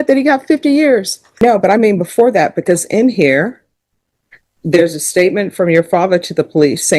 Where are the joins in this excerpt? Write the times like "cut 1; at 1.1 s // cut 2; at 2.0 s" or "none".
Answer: cut 1; at 1.4 s